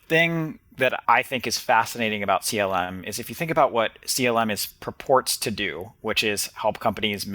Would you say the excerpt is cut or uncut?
cut